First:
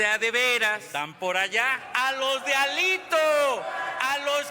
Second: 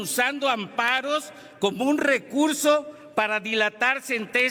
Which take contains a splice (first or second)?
first